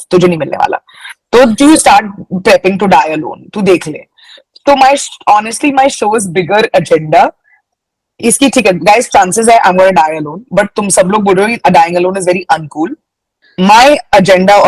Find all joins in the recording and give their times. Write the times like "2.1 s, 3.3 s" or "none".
none